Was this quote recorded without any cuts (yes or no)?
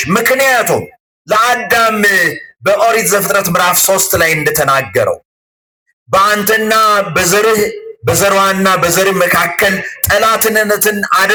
yes